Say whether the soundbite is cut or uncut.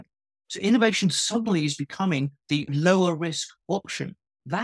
cut